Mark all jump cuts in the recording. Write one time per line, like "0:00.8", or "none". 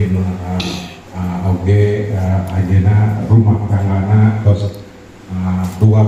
0:01.0